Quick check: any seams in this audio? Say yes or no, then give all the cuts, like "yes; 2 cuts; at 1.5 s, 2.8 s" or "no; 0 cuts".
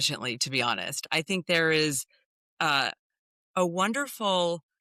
no; 0 cuts